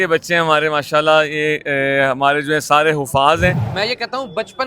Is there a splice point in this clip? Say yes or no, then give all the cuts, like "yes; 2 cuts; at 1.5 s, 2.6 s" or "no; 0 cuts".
yes; 1 cut; at 3.6 s